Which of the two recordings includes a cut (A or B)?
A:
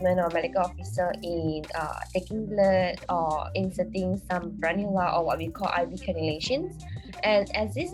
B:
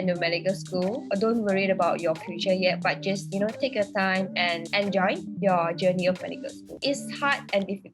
B